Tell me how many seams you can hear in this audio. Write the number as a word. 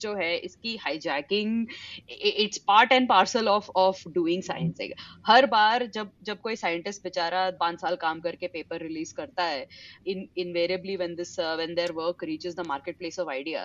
three